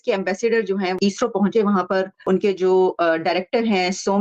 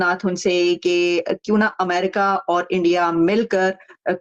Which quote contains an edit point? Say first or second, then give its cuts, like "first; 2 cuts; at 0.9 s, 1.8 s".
first; 2 cuts; at 1.0 s, 2.1 s